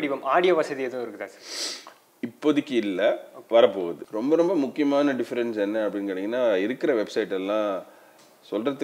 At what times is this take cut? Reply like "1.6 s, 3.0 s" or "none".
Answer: 4.0 s